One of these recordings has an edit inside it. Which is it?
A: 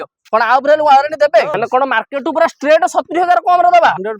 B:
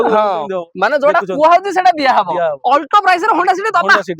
A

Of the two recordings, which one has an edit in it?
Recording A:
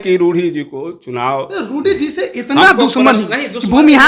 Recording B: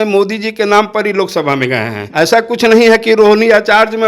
B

